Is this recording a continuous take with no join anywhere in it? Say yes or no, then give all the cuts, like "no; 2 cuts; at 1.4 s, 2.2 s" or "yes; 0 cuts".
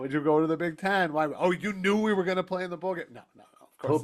yes; 0 cuts